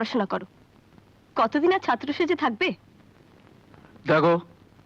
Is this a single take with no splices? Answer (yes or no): yes